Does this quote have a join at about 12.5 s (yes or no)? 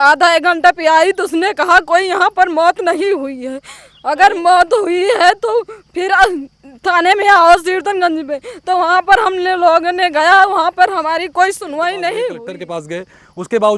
yes